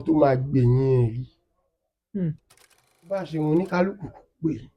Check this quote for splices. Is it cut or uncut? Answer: cut